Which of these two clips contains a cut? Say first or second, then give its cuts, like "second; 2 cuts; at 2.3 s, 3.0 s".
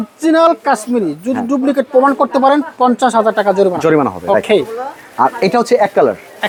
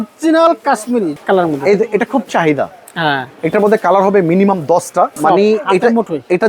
second; 2 cuts; at 1.2 s, 5.1 s